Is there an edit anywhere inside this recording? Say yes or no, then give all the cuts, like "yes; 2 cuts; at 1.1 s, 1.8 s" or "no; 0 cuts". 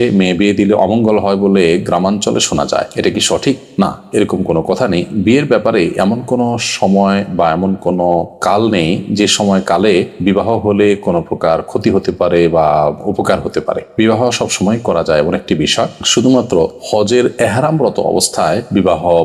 no; 0 cuts